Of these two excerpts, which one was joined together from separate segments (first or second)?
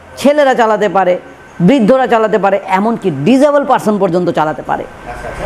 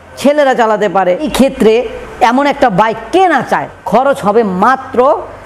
second